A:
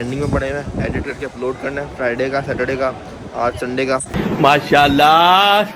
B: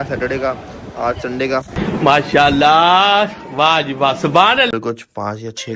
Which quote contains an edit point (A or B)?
B